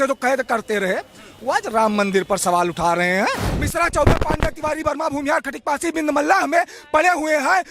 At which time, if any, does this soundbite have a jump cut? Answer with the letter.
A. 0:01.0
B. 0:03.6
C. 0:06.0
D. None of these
B